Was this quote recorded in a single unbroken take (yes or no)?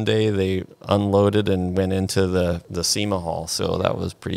no